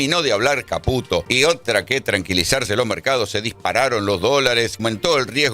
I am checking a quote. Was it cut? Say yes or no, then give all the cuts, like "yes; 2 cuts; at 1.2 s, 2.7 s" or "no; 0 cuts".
yes; 2 cuts; at 1.3 s, 4.8 s